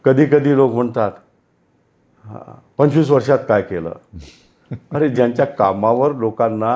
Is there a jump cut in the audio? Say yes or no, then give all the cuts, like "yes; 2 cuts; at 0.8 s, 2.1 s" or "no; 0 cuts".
no; 0 cuts